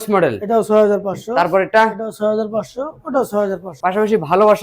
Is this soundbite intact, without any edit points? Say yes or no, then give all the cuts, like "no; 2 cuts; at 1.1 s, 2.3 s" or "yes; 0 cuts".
no; 1 cut; at 3.7 s